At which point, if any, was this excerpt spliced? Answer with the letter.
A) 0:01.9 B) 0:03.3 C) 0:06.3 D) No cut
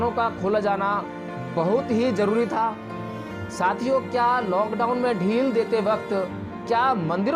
D